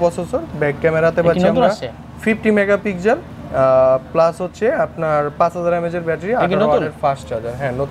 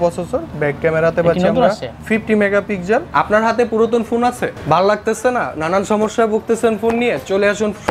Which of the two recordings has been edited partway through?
second; 3 cuts; at 1.9 s, 3.1 s, 4.5 s

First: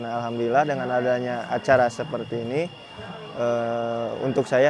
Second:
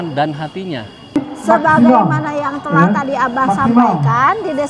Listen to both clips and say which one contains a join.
second; 1 cut; at 1.0 s

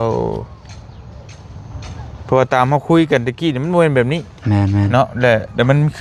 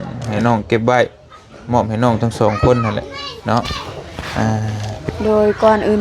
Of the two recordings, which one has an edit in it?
second; 1 cut; at 5.1 s

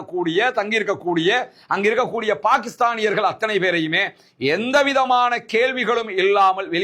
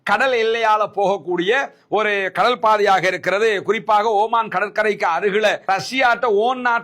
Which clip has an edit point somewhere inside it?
second; 1 cut; at 5.6 s

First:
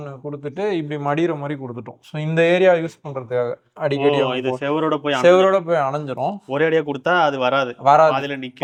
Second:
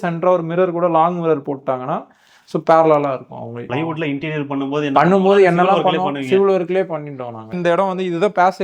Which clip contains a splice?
second; 2 cuts; at 3.6 s, 7.5 s

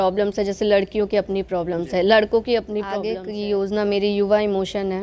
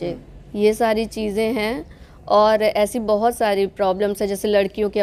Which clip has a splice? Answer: first; 1 cut; at 3.0 s

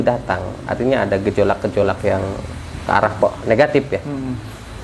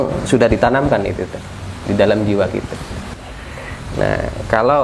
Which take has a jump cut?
second; 1 cut; at 3.0 s

